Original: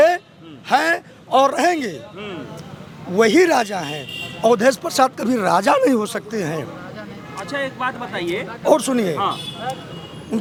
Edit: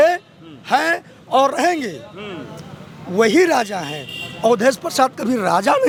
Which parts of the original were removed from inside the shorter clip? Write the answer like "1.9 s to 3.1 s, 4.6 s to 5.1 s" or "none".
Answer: none